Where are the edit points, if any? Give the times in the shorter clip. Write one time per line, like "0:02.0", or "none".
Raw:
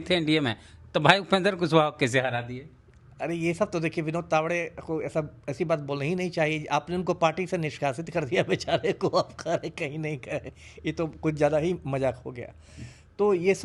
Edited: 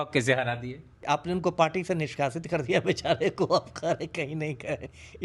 0:01.0